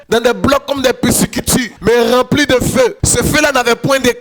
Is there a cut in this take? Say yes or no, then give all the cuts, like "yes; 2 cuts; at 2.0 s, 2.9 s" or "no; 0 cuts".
no; 0 cuts